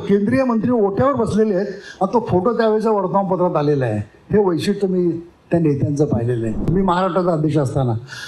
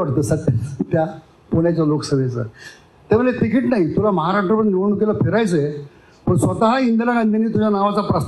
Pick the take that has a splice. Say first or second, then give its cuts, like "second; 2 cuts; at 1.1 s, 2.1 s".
first; 1 cut; at 6.7 s